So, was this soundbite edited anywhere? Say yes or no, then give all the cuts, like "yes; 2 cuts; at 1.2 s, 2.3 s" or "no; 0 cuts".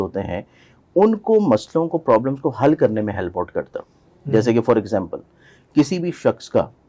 no; 0 cuts